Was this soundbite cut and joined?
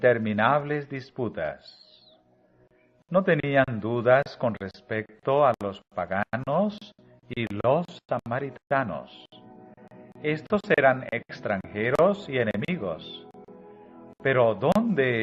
no; 0 cuts

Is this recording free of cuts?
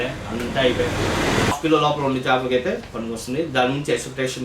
no; 1 cut; at 1.5 s

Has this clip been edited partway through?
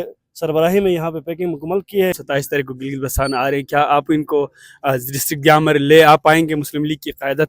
yes; 1 cut; at 2.2 s

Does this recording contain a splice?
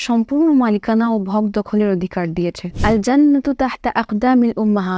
yes; 1 cut; at 2.7 s

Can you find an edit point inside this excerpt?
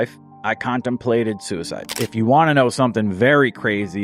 yes; 1 cut; at 2.0 s

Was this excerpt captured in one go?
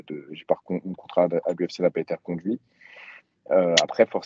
yes; 0 cuts

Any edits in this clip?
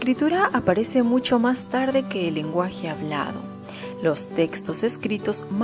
no; 0 cuts

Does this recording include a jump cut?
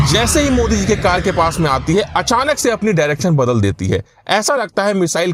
no; 0 cuts

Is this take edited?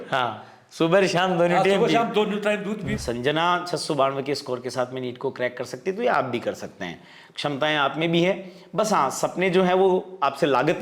yes; 1 cut; at 2.8 s

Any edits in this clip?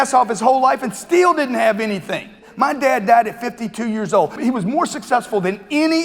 yes; 2 cuts; at 2.5 s, 4.4 s

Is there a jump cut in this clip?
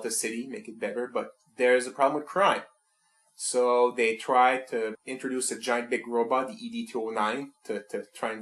no; 0 cuts

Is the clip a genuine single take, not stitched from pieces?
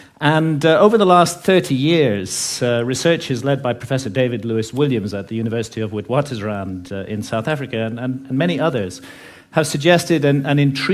no; 1 cut; at 2.1 s

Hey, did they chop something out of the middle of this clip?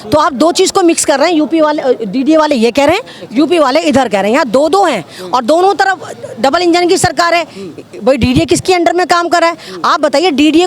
no; 0 cuts

